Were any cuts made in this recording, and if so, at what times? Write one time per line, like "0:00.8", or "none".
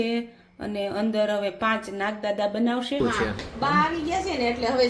0:03.0